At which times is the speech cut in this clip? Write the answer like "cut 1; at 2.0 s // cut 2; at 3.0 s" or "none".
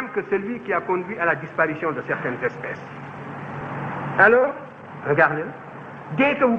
cut 1; at 3.5 s